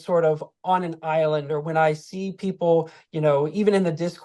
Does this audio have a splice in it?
no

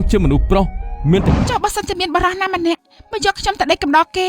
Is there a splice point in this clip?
yes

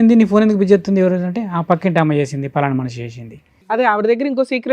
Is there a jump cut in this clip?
yes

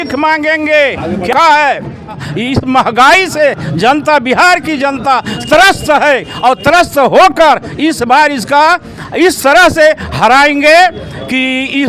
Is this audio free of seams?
no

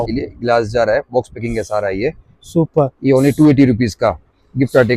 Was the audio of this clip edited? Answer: no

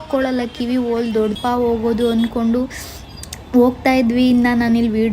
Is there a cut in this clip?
yes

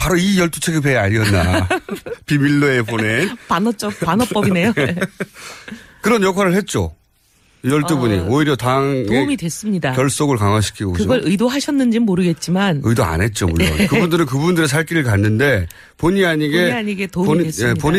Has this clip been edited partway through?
no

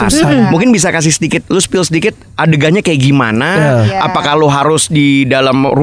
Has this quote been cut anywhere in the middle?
no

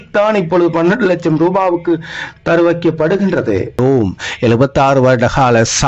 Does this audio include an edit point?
yes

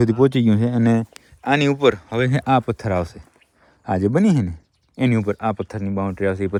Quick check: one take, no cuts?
yes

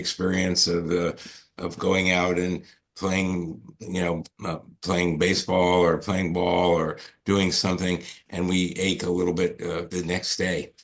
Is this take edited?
yes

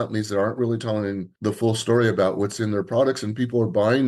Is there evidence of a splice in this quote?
yes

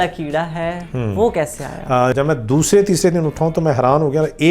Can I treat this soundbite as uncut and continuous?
no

